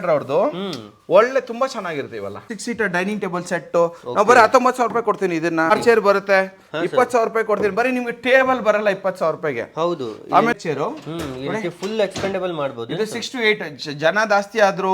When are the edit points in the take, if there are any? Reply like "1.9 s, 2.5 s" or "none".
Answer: 2.5 s, 5.7 s, 10.5 s